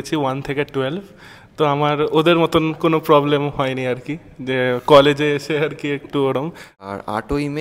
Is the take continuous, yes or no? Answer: no